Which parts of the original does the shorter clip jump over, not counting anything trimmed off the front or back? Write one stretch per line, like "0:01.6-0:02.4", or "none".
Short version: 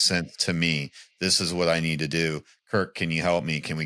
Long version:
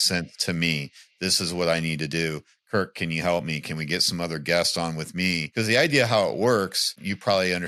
none

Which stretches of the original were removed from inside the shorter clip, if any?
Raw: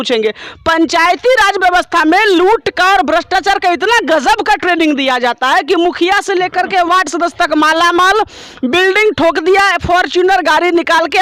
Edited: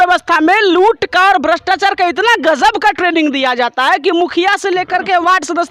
none

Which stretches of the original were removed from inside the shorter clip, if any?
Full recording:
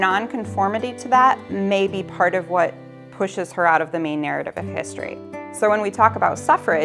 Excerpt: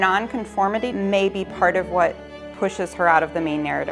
0:00.9-0:01.5

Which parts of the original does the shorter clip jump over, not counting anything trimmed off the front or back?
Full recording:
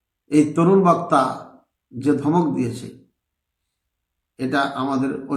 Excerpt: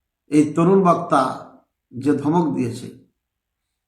none

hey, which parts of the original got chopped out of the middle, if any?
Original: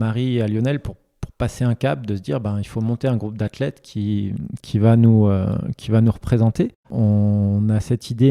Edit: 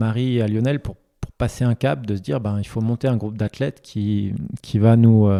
none

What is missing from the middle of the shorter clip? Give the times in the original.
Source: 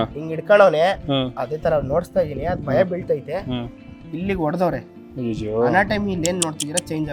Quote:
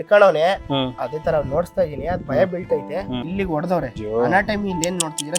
0:03.6-0:04.2
0:04.9-0:05.4

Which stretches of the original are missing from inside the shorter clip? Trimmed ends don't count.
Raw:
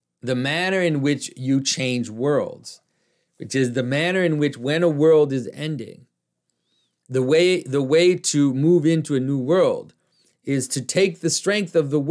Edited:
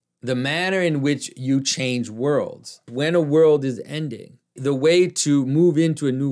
0:02.9-0:04.6
0:06.2-0:07.6

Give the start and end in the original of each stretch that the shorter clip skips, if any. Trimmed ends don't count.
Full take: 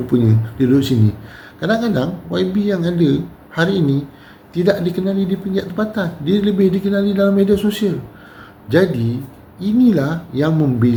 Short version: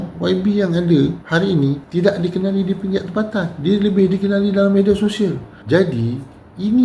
0:03.5-0:04.0
0:08.1-0:08.5

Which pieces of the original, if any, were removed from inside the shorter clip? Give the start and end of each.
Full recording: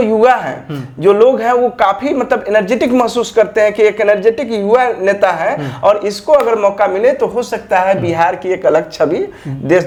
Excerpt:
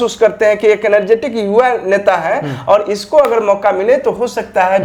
none

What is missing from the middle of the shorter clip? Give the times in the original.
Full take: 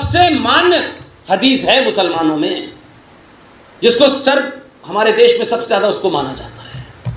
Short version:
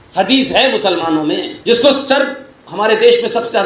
0:02.7-0:03.7

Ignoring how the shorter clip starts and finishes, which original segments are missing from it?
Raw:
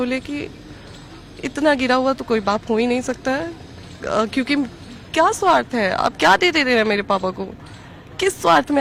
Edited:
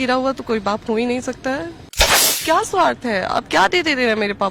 0:03.9-0:04.8

